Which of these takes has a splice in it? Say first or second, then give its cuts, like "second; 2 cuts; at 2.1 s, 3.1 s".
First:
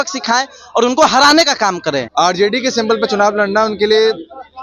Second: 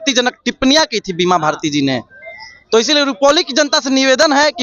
first; 1 cut; at 2.1 s